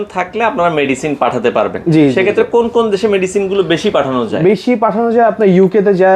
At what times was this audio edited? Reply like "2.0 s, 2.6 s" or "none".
none